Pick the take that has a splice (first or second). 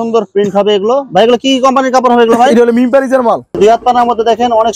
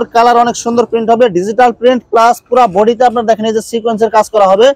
first